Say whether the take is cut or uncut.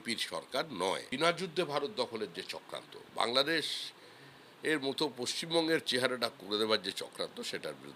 cut